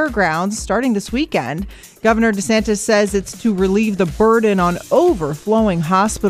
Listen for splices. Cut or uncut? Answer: uncut